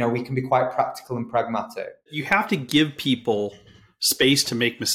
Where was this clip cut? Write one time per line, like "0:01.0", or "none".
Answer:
0:02.2